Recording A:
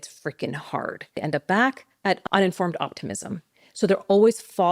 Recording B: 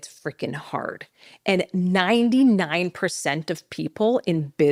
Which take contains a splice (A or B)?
A